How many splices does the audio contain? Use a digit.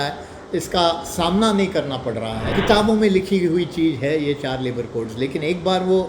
1